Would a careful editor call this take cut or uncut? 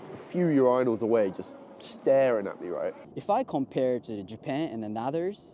cut